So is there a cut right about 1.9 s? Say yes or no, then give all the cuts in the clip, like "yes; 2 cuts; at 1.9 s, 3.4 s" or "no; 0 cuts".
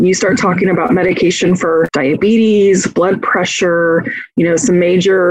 yes; 1 cut; at 1.9 s